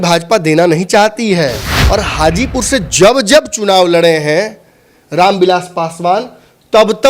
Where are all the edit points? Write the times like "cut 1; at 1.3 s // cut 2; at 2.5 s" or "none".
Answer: cut 1; at 1.7 s